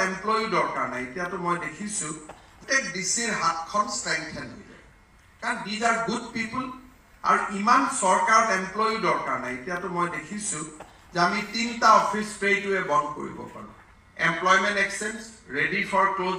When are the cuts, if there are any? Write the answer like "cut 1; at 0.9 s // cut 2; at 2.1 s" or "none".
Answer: cut 1; at 2.6 s